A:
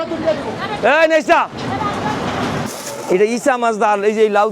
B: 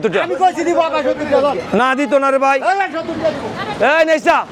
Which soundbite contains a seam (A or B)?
A